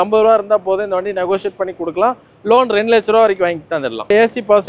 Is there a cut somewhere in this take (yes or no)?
no